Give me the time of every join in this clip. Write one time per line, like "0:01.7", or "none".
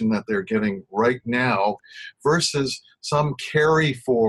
0:01.9